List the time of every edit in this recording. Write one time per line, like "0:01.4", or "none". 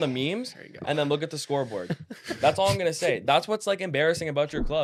none